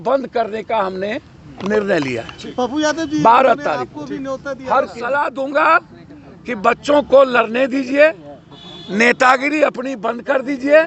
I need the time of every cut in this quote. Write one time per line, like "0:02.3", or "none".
0:05.0